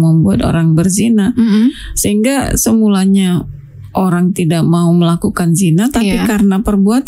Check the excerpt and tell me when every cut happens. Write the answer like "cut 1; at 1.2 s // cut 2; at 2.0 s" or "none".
none